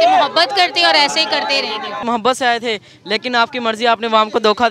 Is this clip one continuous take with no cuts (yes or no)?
no